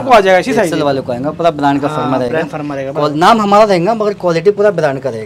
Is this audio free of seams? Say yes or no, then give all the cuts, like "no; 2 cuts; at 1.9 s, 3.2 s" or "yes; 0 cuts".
yes; 0 cuts